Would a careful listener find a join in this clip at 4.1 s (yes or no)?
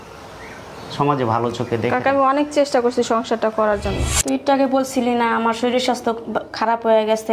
yes